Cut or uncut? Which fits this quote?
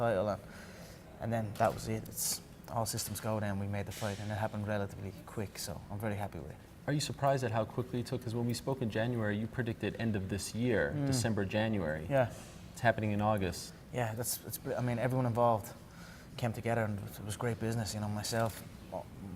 cut